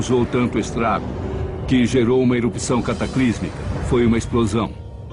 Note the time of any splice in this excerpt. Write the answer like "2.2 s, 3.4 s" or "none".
1.6 s

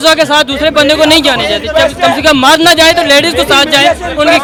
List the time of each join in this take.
none

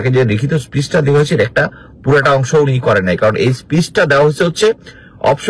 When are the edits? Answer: none

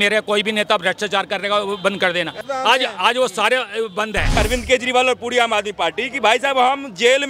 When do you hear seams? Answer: 2.3 s, 4.4 s

